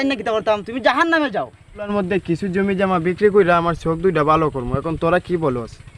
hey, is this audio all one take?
no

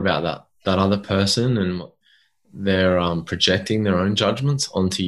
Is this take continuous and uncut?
no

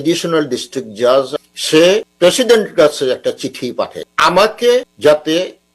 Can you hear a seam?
yes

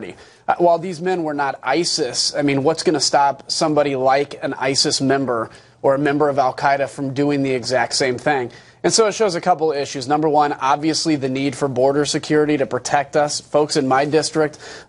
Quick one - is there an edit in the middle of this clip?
no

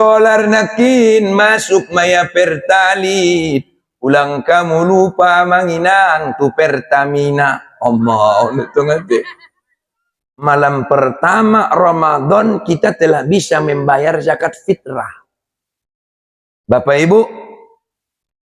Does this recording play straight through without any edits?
no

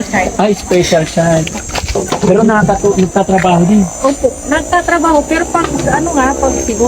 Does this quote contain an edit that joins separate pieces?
yes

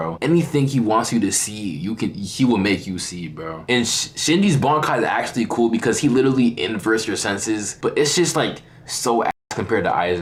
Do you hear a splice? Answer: no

